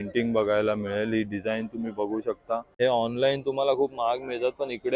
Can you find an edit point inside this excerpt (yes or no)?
yes